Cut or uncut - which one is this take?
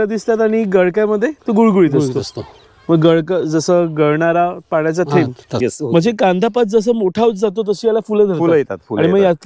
cut